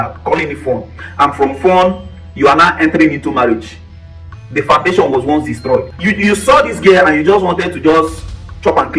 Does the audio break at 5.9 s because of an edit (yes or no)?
yes